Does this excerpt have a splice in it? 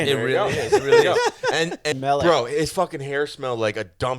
yes; 1 cut; at 1.9 s

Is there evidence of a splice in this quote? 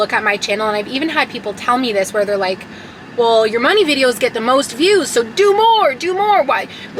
no; 0 cuts

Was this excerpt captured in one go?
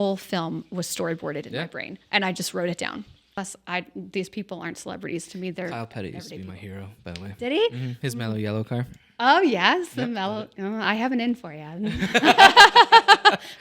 no; 1 cut; at 3.3 s

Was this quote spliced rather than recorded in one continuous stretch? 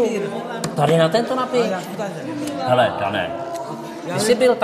no; 0 cuts

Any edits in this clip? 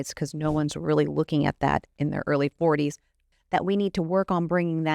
yes; 1 cut; at 3.3 s

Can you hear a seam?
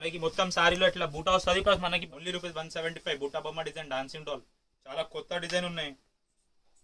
yes; 1 cut; at 2.0 s

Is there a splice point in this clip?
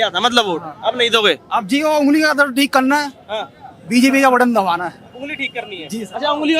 no; 0 cuts

